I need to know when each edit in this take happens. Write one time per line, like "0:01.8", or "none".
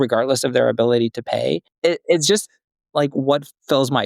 0:01.7